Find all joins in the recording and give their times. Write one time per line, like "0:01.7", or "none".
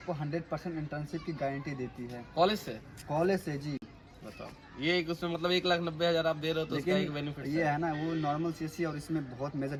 none